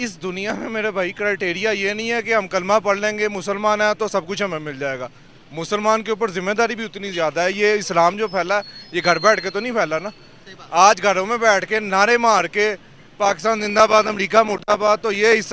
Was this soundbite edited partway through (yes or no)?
no